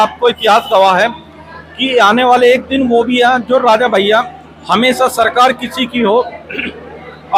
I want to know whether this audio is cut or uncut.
uncut